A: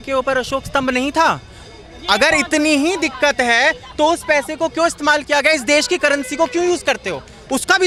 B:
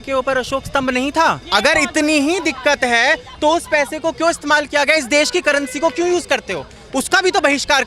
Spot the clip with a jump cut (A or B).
B